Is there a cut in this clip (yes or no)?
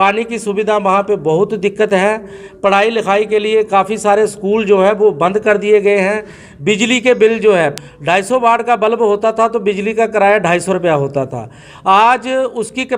yes